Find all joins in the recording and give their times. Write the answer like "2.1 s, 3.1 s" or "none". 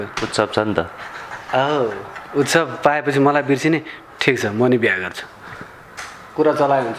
none